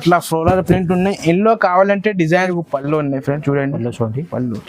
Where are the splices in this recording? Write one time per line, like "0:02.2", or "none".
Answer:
0:02.5

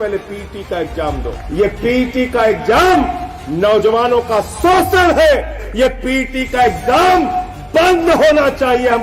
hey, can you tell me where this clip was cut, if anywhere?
0:01.4
0:05.6

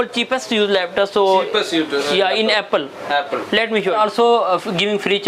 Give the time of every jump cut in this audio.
0:03.9

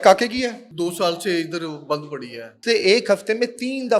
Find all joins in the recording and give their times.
0:02.5

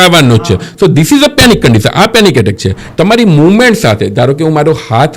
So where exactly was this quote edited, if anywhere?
0:02.8

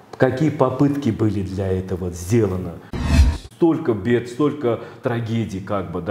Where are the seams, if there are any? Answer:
0:03.1

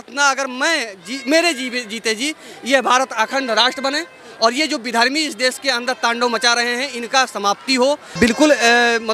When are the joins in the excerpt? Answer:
0:08.1

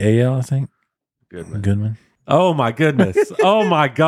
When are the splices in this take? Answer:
0:02.1

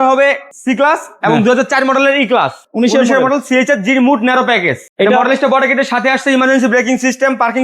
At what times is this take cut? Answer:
0:02.6
0:04.9

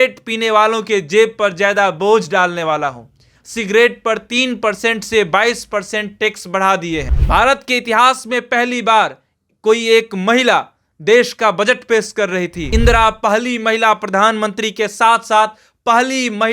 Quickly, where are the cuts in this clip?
0:03.3
0:07.2
0:12.6

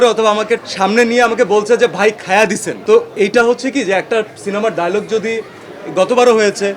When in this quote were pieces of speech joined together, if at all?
none

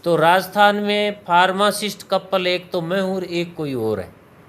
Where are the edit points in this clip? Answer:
none

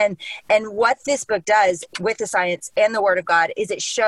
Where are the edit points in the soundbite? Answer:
none

